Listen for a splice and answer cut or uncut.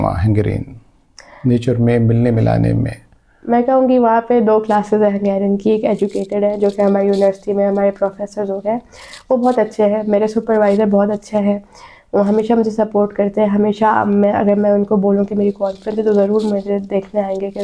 uncut